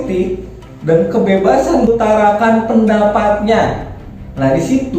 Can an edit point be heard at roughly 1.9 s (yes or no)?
yes